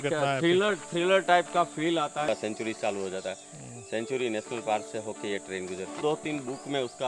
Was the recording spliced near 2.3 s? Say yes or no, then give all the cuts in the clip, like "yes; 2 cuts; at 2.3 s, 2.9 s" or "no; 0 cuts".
yes; 2 cuts; at 2.3 s, 6.0 s